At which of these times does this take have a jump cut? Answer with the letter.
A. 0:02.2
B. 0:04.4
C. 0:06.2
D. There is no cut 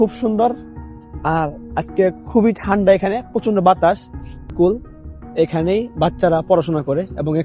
B